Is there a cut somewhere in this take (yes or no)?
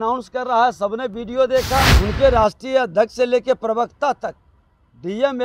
yes